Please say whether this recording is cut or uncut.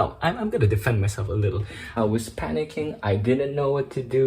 cut